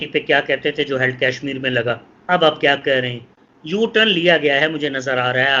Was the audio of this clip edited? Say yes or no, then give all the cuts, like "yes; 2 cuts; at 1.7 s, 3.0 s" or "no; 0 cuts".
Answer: no; 0 cuts